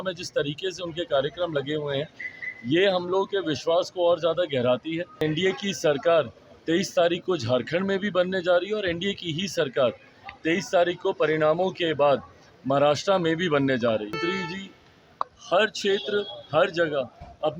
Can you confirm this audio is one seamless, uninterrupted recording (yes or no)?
no